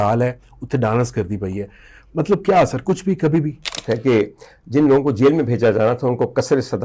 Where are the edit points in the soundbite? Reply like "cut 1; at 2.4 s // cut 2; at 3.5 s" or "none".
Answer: cut 1; at 3.7 s